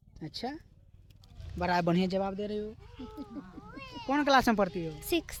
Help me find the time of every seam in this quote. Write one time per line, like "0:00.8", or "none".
none

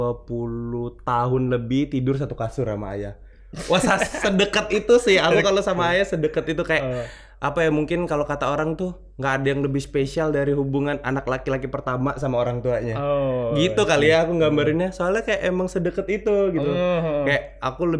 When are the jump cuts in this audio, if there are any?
none

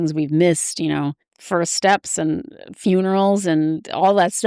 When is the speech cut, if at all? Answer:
0:01.3

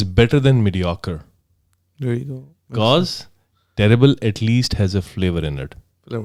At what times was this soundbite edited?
none

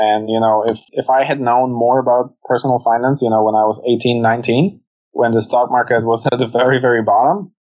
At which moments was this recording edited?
0:00.9

